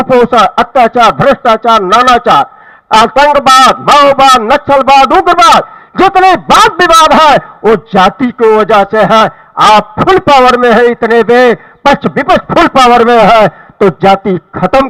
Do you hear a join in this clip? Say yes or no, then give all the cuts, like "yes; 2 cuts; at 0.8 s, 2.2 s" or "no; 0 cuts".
no; 0 cuts